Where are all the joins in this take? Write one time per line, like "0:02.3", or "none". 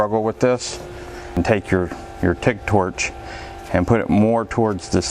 0:01.4